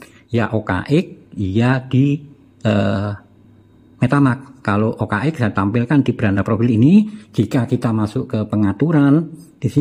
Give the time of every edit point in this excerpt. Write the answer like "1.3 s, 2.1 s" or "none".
none

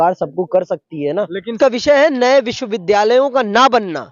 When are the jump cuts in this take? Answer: 1.5 s

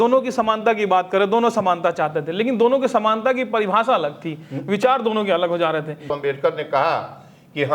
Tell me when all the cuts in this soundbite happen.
6.1 s

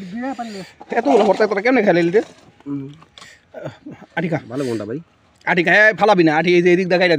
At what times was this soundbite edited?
none

